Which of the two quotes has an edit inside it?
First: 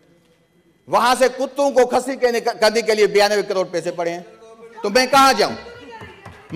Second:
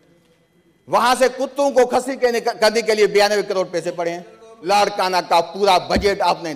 second; 1 cut; at 4.5 s

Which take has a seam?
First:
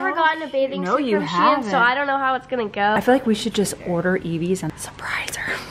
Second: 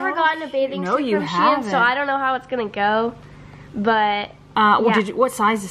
first; 2 cuts; at 3.0 s, 4.7 s

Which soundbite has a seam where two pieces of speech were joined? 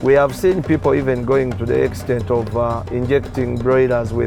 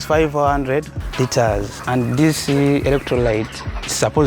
second; 2 cuts; at 1.0 s, 1.7 s

